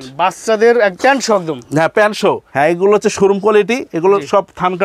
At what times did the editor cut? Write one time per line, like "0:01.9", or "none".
0:02.5